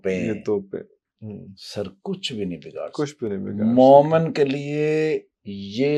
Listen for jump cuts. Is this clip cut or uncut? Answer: uncut